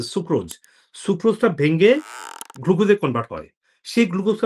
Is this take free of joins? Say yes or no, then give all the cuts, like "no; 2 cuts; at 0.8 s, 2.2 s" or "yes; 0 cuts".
yes; 0 cuts